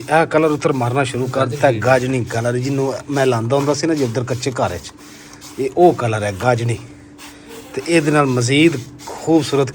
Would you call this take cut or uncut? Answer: uncut